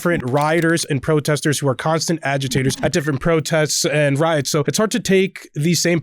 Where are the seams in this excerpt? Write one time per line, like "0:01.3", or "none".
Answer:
0:02.8
0:04.7